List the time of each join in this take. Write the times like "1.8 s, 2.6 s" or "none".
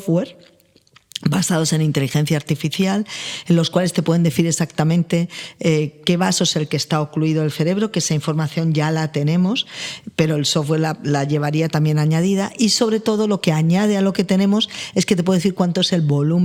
none